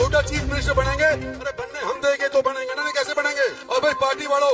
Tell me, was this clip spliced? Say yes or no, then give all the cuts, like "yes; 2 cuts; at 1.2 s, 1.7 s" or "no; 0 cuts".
yes; 1 cut; at 3.6 s